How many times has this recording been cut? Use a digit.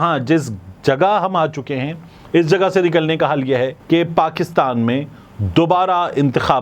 1